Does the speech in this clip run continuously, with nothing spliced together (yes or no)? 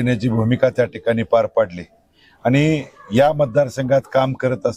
yes